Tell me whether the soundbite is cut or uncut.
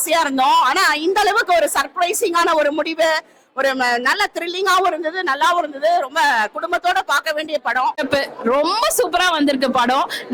cut